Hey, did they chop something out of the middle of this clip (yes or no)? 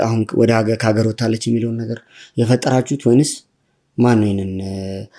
no